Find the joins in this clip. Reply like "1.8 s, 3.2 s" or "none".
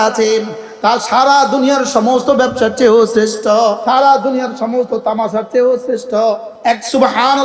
3.8 s, 6.5 s